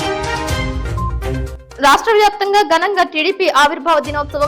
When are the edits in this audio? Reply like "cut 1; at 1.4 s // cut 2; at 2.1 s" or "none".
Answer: cut 1; at 0.9 s // cut 2; at 1.6 s